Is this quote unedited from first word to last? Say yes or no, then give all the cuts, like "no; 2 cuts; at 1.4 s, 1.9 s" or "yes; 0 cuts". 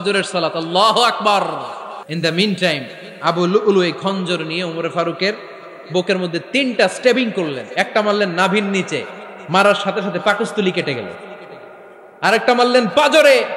no; 1 cut; at 2.0 s